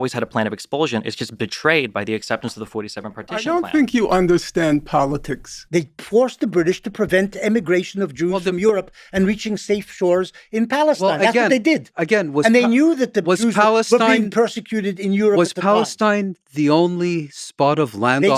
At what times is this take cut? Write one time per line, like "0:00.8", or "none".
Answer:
0:05.6